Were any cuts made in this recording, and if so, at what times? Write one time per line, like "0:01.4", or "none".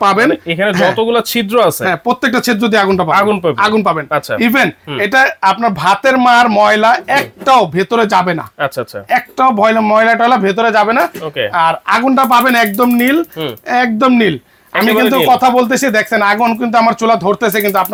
none